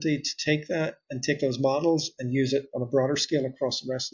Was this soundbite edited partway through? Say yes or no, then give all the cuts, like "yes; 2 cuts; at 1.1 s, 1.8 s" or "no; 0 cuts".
no; 0 cuts